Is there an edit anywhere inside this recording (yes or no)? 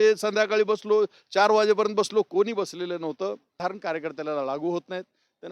yes